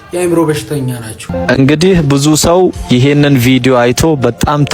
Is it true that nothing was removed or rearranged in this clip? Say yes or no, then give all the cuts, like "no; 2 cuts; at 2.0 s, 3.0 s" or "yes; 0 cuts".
no; 1 cut; at 1.3 s